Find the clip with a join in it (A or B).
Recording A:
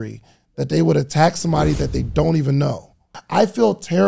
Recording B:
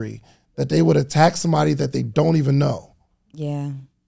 A